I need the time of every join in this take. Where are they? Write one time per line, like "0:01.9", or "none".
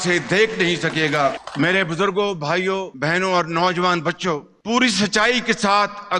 none